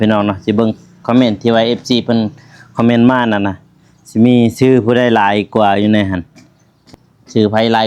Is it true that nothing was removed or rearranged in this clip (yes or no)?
no